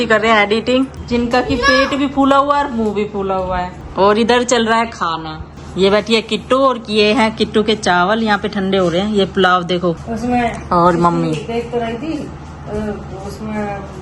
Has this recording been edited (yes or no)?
no